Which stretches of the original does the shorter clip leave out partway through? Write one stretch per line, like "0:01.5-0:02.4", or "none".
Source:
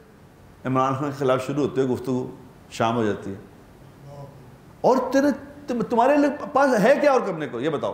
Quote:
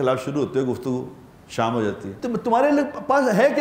0:03.3-0:05.6